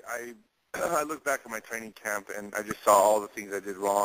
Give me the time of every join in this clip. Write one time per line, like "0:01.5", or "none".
none